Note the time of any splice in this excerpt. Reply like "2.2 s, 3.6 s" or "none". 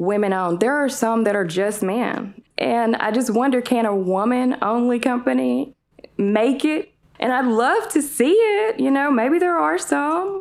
2.4 s, 7.0 s